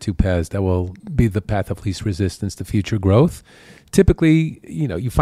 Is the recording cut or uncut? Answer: uncut